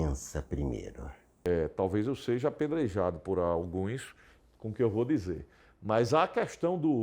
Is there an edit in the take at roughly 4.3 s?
no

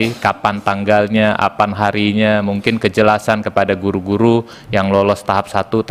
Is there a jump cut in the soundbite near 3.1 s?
no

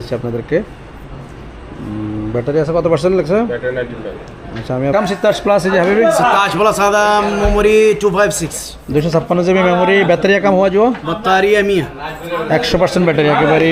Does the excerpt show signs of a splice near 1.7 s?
no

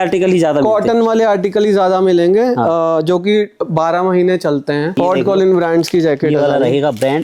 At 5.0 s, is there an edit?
yes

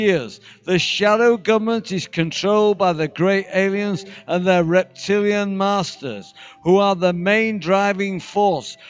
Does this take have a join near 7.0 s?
no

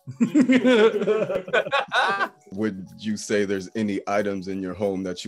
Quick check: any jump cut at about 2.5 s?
yes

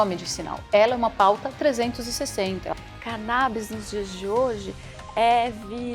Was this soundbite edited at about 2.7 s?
yes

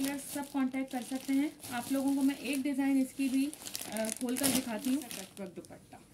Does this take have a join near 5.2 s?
yes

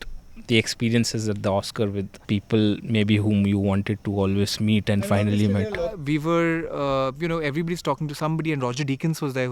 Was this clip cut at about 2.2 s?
yes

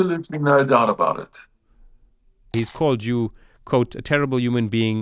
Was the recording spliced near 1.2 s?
no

